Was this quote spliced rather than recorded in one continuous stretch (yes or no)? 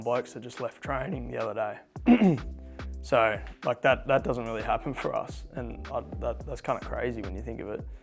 no